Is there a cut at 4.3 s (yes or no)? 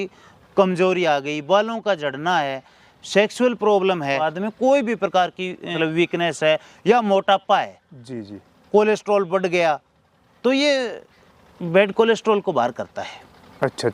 yes